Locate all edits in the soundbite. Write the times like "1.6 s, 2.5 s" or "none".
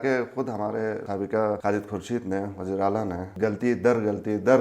1.1 s, 3.2 s